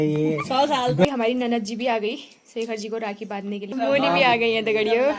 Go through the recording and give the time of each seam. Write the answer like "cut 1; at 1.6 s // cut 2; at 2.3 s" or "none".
cut 1; at 1.0 s // cut 2; at 3.7 s